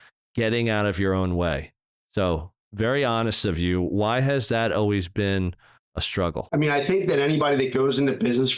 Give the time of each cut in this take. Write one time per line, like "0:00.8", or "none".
0:06.5